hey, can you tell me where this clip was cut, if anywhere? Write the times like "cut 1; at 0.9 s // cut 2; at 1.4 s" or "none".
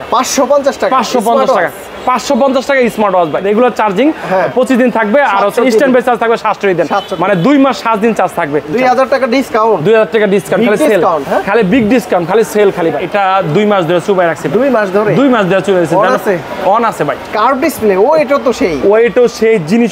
cut 1; at 3.4 s // cut 2; at 8.7 s // cut 3; at 13.0 s // cut 4; at 17.2 s

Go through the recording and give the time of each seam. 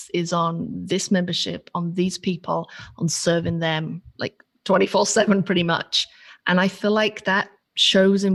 none

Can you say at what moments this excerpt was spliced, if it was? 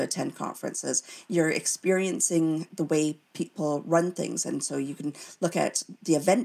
cut 1; at 2.7 s

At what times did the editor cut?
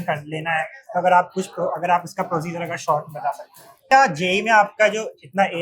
cut 1; at 3.9 s

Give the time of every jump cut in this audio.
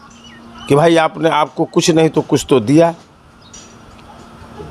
none

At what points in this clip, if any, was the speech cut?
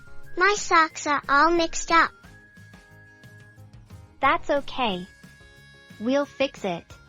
cut 1; at 2.1 s // cut 2; at 4.2 s

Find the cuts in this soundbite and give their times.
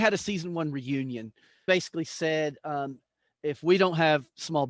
cut 1; at 1.7 s

